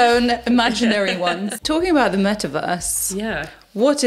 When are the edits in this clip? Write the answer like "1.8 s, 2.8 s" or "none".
1.6 s